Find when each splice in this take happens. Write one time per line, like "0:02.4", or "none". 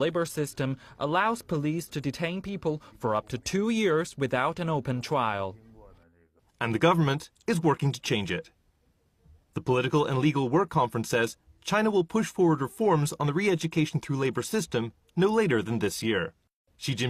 none